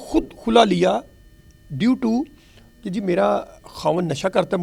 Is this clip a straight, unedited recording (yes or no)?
yes